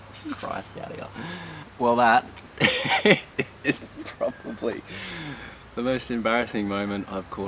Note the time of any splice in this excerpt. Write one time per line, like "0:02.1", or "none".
0:01.6